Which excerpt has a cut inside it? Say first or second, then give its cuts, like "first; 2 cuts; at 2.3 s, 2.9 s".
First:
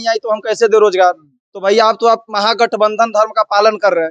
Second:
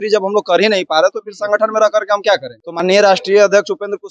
second; 1 cut; at 2.6 s